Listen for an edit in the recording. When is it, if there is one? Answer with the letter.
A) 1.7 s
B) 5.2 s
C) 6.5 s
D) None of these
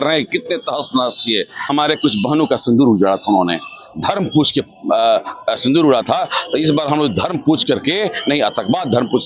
A